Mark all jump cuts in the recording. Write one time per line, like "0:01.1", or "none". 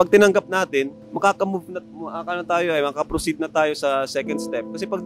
0:01.0